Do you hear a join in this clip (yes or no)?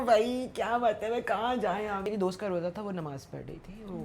yes